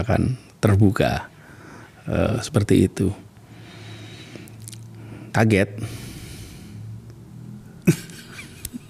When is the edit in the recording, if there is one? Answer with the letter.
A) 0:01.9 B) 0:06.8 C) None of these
C